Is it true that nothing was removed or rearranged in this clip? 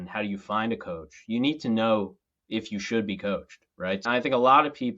no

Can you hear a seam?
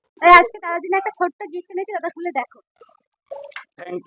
no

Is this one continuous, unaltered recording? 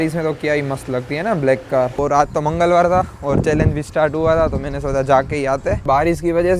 no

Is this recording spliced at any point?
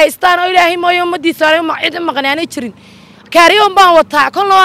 no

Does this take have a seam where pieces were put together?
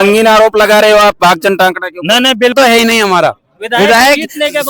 yes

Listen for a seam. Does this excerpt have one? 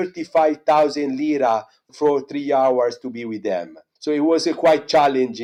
no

